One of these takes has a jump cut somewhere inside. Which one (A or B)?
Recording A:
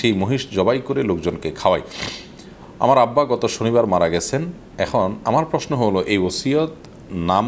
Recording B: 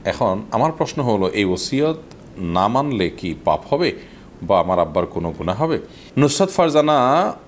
B